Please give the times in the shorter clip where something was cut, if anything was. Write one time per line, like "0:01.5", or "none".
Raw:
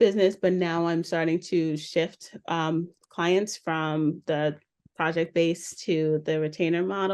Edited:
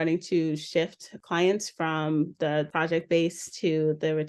0:01.1
0:02.7